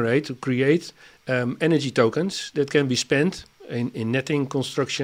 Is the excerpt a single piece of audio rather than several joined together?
yes; 0 cuts

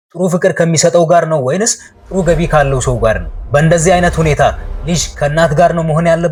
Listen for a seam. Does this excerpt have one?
no; 0 cuts

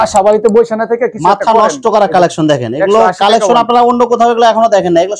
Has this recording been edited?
no; 0 cuts

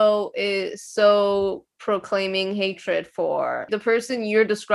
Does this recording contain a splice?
yes; 1 cut; at 3.7 s

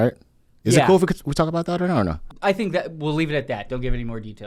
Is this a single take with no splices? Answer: no; 1 cut; at 2.2 s

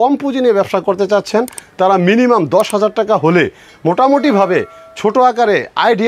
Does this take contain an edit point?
no; 0 cuts

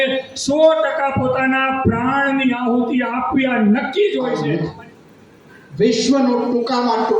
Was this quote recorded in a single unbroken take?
no; 1 cut; at 4.4 s

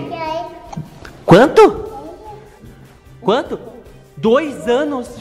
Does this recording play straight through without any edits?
no; 1 cut; at 2.6 s

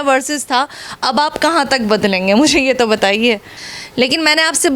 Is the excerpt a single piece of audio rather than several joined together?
no; 1 cut; at 3.5 s

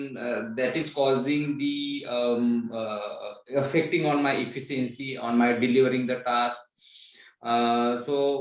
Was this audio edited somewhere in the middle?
no; 0 cuts

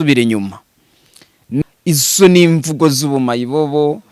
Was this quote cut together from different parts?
yes; 1 cut; at 1.4 s

